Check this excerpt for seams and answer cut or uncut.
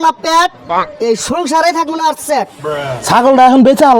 cut